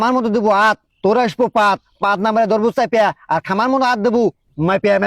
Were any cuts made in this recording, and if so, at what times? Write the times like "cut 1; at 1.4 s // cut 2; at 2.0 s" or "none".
none

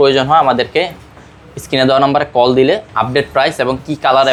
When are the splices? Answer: none

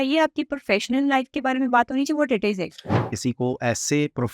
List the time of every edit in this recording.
cut 1; at 3.1 s

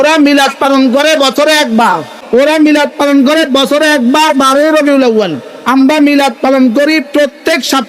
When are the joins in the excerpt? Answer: cut 1; at 2.1 s

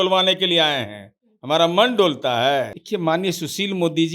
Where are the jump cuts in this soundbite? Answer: cut 1; at 2.8 s

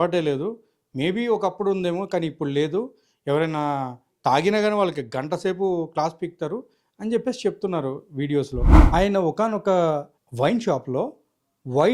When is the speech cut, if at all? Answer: none

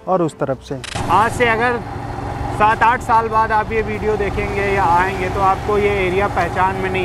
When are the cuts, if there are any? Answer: cut 1; at 0.9 s

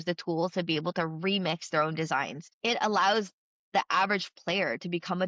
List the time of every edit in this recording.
cut 1; at 2.4 s

